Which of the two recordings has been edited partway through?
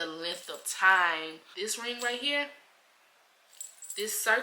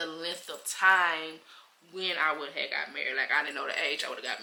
first; 1 cut; at 1.4 s

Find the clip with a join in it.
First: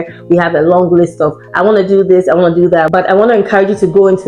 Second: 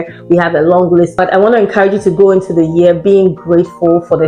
second; 1 cut; at 1.1 s

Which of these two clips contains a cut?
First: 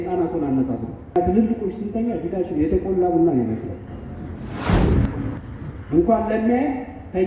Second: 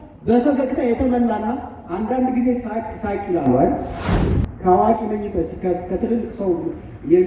first; 1 cut; at 1.1 s

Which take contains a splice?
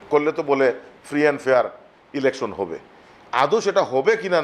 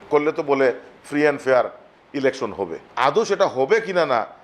second; 1 cut; at 2.8 s

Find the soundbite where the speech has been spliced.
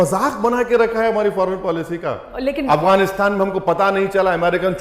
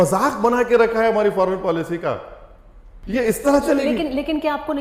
first; 1 cut; at 2.3 s

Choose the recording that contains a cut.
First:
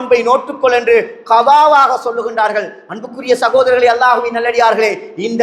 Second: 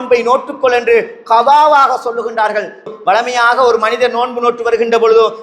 second; 1 cut; at 2.9 s

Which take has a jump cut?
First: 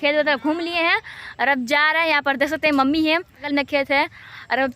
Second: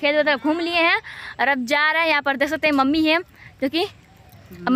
first; 1 cut; at 3.5 s

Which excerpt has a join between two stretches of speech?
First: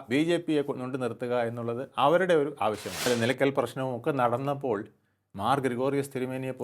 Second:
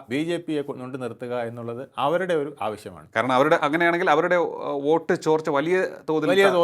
first; 1 cut; at 2.9 s

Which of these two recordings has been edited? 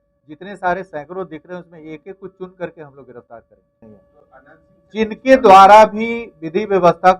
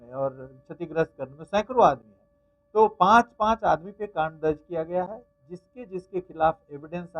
first; 1 cut; at 3.8 s

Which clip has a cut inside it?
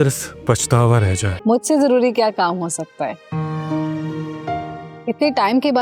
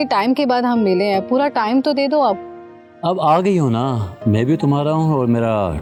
first; 1 cut; at 1.3 s

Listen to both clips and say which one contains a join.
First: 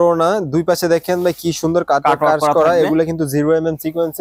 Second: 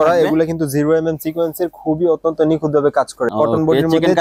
second; 1 cut; at 3.2 s

